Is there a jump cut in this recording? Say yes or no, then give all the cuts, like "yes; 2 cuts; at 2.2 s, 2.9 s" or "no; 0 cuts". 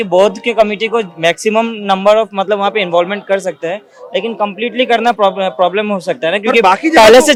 no; 0 cuts